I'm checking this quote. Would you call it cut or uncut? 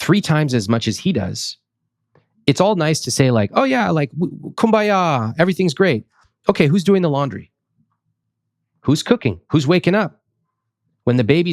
uncut